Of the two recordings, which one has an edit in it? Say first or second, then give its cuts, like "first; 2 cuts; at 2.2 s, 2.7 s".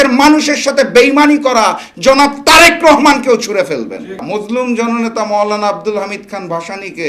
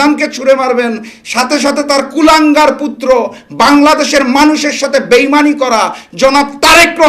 first; 1 cut; at 4.2 s